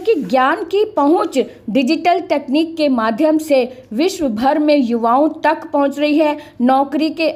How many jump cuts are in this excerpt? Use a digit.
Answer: 0